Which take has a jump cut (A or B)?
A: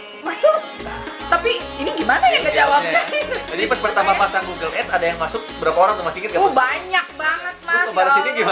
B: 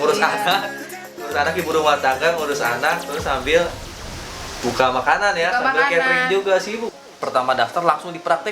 B